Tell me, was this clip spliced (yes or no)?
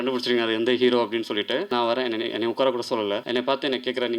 yes